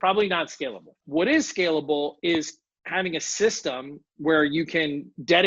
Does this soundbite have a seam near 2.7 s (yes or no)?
no